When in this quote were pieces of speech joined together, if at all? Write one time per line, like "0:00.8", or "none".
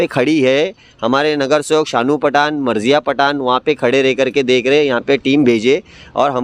none